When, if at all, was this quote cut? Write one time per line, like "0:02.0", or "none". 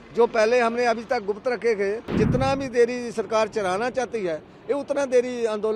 0:02.1